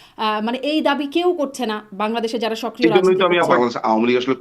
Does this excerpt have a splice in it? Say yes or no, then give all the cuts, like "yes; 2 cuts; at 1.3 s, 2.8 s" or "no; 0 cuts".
yes; 1 cut; at 3.5 s